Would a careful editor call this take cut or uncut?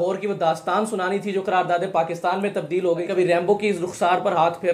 cut